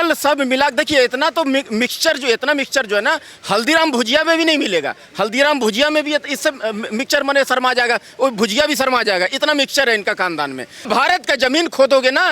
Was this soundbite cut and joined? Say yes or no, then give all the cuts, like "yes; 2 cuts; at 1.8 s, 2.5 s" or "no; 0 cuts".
yes; 1 cut; at 10.8 s